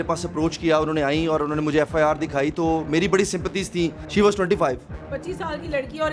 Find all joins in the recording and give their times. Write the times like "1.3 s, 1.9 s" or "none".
4.0 s